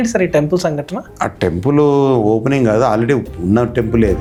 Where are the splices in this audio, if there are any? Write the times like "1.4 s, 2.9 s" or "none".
none